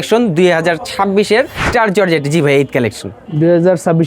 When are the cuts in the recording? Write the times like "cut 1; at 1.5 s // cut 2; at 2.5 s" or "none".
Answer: cut 1; at 1.6 s